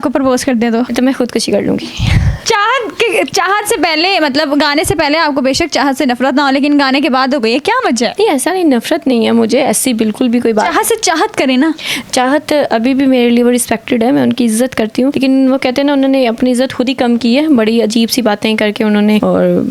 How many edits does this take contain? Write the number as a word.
zero